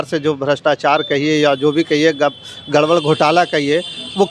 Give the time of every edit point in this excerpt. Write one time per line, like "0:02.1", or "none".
none

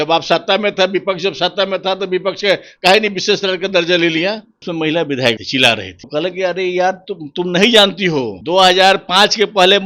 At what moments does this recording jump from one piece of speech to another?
0:04.6
0:05.4
0:08.4

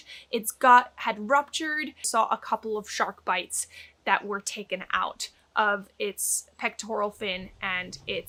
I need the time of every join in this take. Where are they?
none

